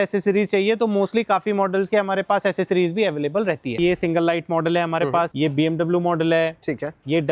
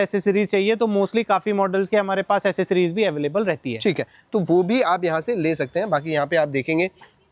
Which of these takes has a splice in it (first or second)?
first